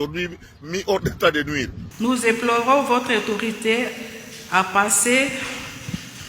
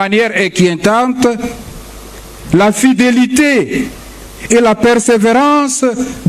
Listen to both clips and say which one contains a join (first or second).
first